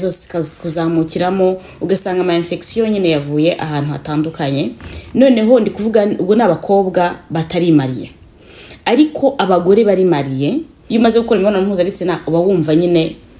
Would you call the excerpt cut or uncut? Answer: cut